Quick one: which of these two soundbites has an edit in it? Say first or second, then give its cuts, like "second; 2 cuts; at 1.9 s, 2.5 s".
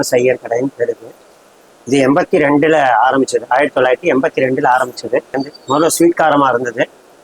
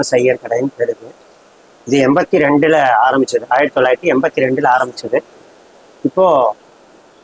first; 1 cut; at 5.4 s